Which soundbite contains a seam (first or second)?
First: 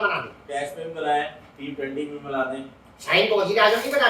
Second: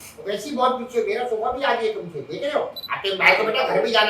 second